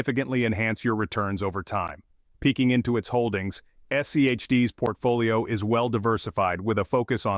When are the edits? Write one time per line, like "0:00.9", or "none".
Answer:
none